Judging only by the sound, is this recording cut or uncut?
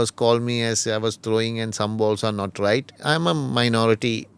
cut